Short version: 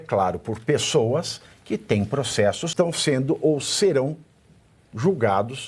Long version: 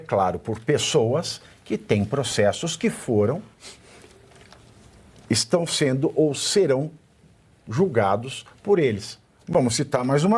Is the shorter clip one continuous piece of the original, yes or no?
no